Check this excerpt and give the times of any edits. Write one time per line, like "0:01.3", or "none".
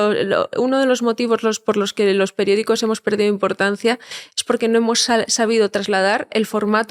none

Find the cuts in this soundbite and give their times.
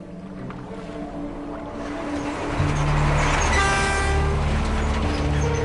0:03.3

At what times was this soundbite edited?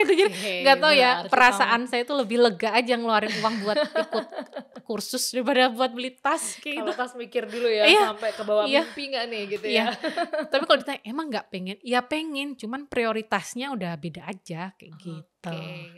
none

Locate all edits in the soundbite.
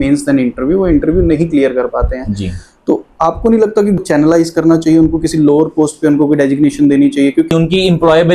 0:04.0
0:07.5

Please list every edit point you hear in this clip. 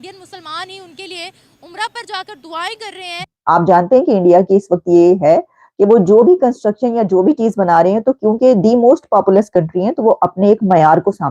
0:03.3

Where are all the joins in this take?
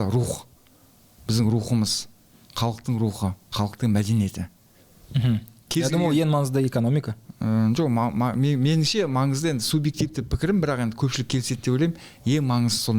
none

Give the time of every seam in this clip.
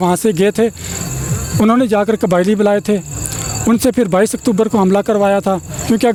none

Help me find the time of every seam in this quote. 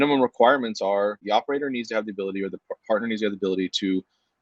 0:01.2

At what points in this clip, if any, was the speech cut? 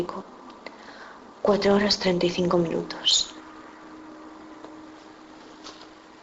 0:01.1

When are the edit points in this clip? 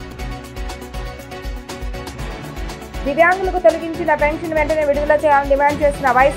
0:02.9

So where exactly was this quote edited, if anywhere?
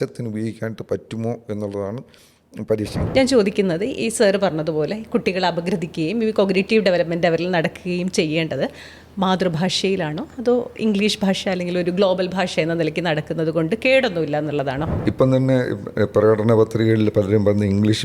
0:02.9
0:14.9

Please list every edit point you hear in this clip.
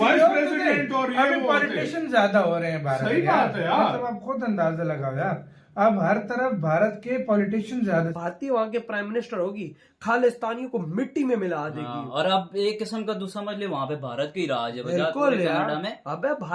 0:08.1

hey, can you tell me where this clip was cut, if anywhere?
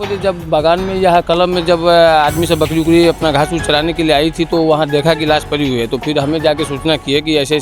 0:05.2

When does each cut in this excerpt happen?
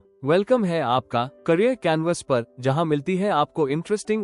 none

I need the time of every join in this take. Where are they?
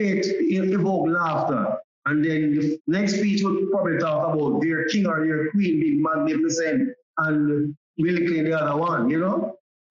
none

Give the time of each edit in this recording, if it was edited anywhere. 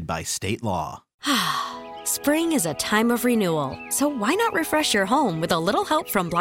0:01.1

